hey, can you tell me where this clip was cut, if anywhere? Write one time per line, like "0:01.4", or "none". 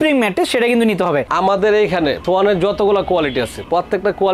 0:01.3